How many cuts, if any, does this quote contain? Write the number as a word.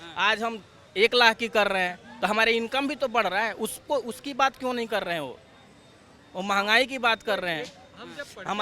zero